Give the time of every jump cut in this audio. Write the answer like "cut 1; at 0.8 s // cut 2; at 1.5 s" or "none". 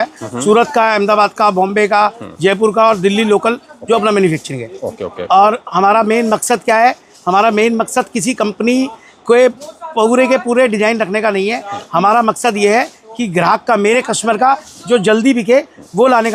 none